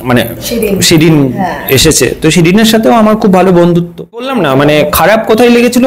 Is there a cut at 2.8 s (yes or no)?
no